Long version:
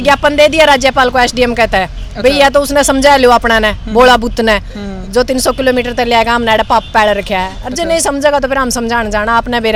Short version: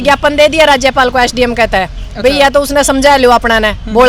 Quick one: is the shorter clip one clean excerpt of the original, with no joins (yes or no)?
yes